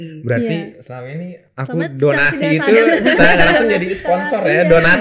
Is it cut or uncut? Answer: uncut